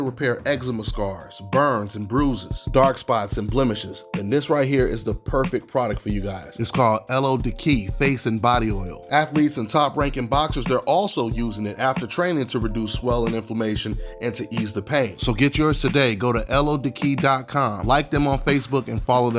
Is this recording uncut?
yes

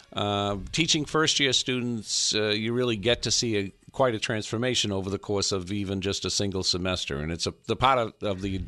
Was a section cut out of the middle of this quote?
yes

